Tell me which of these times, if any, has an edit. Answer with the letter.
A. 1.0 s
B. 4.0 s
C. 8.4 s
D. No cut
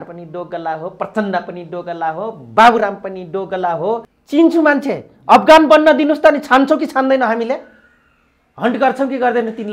B